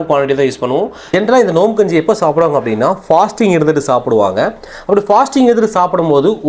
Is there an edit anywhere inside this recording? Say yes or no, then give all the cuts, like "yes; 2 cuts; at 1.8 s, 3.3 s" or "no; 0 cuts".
yes; 1 cut; at 1.0 s